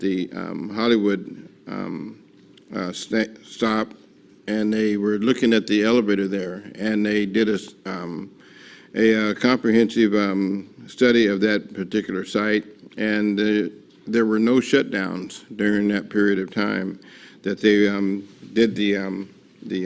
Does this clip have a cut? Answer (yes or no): no